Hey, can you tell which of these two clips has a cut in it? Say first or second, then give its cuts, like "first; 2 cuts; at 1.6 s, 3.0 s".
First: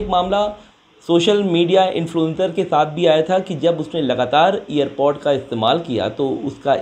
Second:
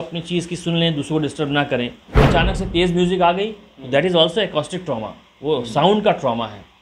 second; 1 cut; at 2.3 s